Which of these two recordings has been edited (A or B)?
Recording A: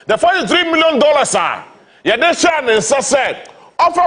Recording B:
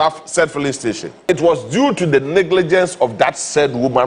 B